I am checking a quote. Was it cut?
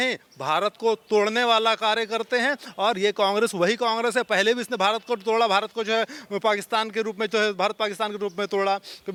no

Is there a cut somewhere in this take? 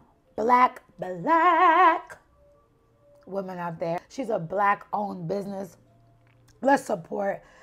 yes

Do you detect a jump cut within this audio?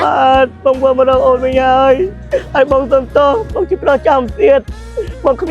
no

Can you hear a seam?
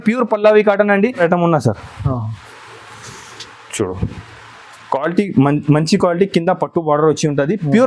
yes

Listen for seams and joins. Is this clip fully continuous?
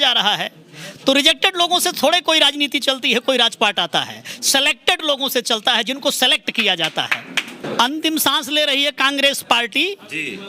no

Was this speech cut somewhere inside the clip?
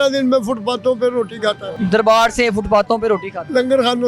yes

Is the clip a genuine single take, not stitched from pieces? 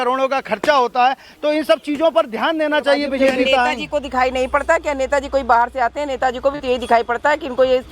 no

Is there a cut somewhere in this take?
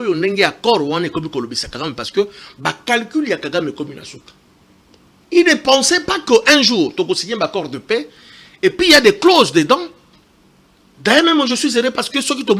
no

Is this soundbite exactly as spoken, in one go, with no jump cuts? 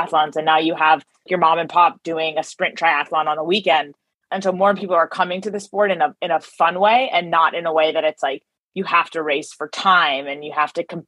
no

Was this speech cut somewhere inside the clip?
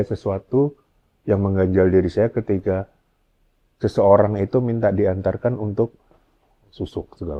no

